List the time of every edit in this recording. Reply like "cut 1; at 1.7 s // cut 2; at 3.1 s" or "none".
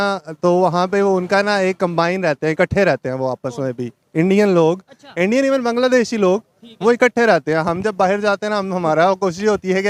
none